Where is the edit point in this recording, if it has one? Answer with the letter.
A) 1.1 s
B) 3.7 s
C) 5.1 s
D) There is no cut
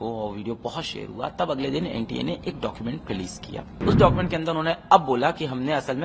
B